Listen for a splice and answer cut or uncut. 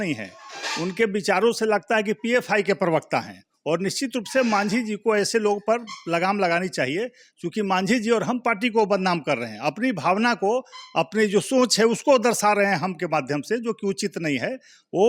uncut